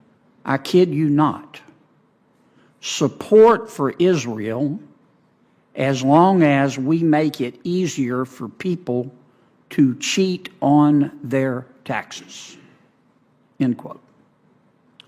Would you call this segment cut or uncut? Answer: uncut